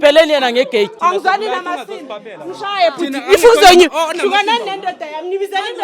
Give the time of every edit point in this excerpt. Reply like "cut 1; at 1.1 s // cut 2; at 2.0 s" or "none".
cut 1; at 1.0 s